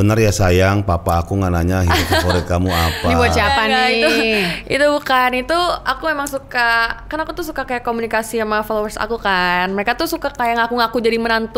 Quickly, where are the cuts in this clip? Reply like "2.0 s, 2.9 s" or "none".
none